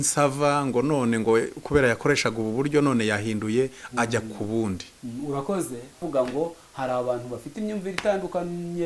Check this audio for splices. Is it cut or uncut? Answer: cut